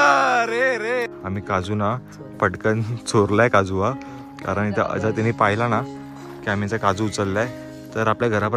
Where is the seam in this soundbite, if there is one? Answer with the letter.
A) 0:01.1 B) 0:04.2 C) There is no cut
A